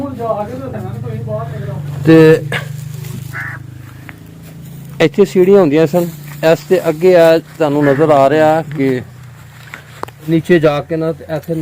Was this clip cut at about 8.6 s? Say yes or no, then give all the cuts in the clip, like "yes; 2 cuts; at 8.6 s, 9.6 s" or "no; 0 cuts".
no; 1 cut; at 10.3 s